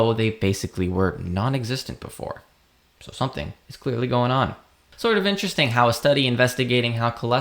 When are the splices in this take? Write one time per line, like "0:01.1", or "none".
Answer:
0:05.0